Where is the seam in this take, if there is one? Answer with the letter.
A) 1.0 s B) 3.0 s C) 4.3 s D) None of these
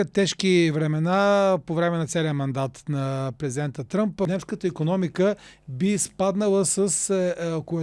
C